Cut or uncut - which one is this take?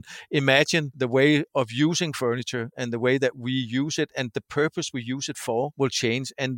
cut